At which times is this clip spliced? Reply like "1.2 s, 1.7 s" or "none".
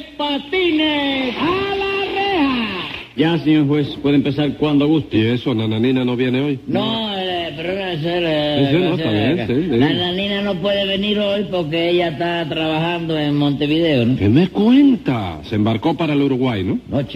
none